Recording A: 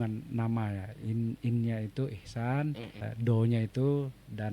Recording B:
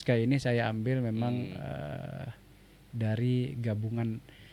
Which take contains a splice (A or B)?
A